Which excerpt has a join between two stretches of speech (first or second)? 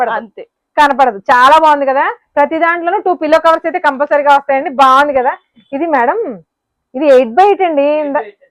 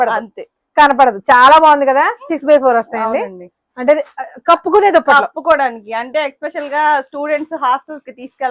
second